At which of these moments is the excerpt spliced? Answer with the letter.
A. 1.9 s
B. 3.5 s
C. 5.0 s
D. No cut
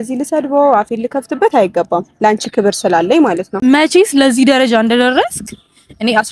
B